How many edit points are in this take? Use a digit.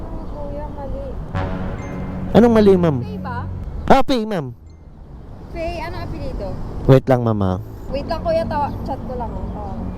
1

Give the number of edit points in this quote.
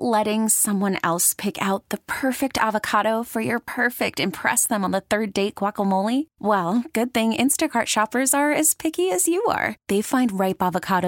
0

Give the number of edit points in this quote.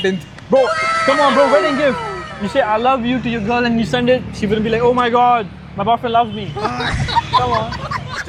0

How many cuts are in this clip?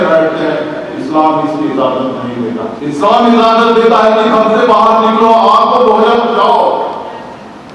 1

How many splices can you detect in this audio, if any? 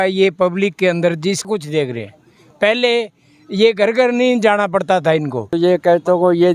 2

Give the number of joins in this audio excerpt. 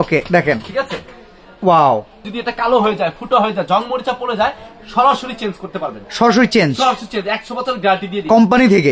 1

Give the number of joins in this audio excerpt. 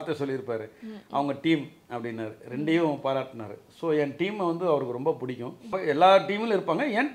1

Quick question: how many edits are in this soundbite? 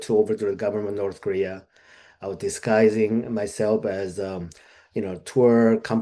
0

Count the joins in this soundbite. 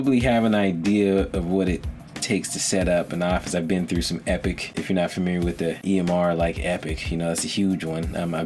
2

